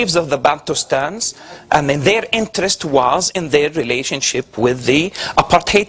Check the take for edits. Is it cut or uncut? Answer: cut